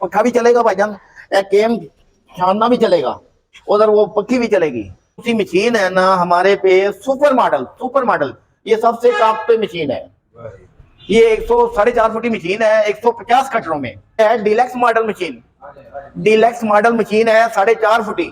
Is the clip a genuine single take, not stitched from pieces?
no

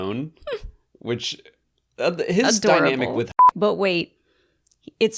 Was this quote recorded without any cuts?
no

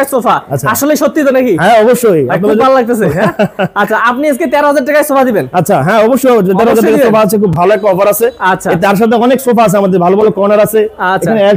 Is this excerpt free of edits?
yes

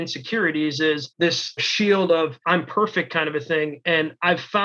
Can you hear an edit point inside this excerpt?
yes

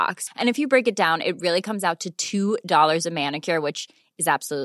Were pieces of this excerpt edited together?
no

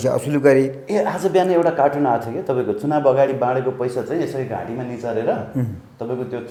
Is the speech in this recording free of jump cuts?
yes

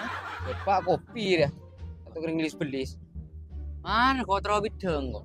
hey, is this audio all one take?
yes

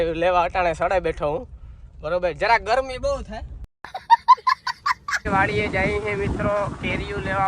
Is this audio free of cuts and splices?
no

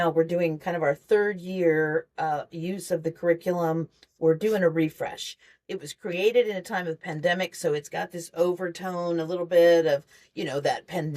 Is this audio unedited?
yes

